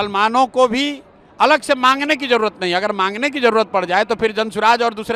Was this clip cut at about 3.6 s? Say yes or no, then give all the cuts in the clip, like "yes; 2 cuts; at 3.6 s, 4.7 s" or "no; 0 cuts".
no; 0 cuts